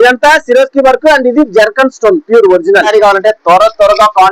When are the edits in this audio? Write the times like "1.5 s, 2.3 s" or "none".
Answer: 2.9 s